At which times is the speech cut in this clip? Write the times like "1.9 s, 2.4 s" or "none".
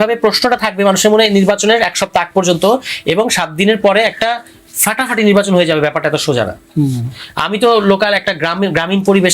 none